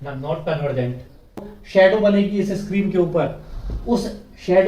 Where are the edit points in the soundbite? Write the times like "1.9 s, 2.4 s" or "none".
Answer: 1.5 s